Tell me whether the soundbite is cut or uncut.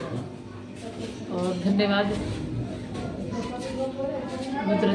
uncut